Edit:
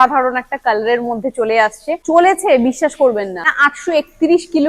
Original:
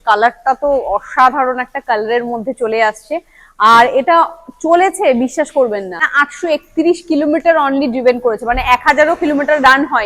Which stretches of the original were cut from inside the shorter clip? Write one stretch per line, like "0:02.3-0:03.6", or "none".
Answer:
0:03.1-0:04.5